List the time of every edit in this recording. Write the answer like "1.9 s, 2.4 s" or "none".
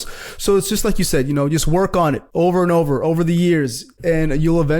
2.2 s, 3.8 s